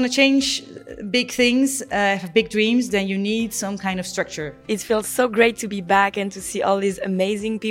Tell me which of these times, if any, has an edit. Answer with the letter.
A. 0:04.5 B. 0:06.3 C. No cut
A